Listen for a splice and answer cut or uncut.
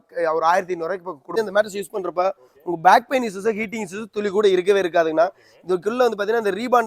cut